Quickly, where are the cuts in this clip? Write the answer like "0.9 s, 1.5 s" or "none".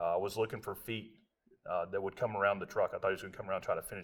none